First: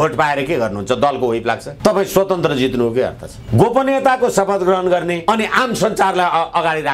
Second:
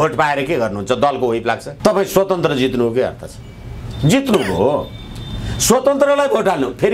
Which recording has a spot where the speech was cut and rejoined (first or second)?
first